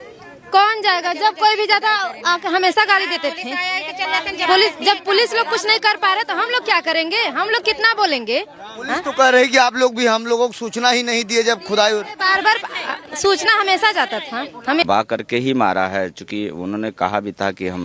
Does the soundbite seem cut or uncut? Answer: cut